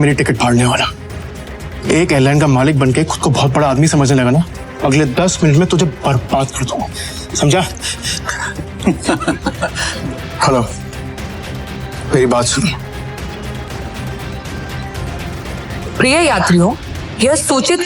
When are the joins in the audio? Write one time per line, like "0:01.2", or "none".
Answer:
0:04.6
0:09.8
0:13.7